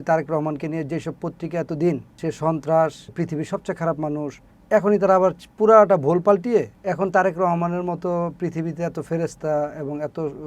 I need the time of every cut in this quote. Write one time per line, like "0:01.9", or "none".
0:02.2
0:03.1
0:04.5
0:06.8